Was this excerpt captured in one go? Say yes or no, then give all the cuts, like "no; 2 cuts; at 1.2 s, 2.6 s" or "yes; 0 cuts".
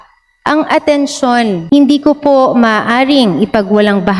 no; 1 cut; at 1.6 s